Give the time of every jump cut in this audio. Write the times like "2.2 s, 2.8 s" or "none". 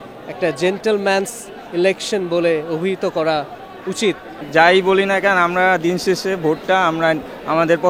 4.3 s